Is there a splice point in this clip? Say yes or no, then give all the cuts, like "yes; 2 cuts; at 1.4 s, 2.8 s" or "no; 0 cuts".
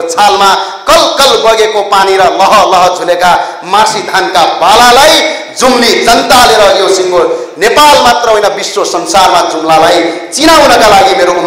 no; 0 cuts